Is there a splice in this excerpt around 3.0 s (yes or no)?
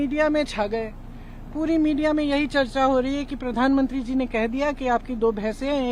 no